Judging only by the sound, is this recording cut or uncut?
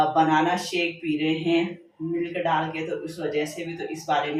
uncut